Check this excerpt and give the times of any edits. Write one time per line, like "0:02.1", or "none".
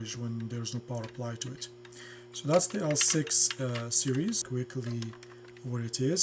0:04.4